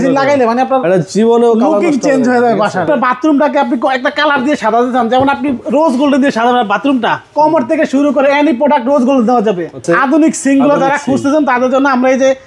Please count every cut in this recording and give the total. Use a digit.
2